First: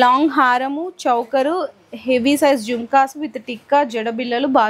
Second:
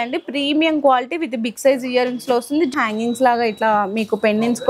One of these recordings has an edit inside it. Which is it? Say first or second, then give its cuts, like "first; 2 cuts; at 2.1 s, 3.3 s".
second; 1 cut; at 2.7 s